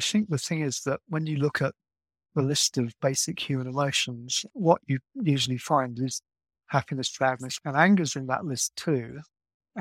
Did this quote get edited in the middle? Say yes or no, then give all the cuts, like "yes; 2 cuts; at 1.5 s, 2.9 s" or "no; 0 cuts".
yes; 1 cut; at 7.5 s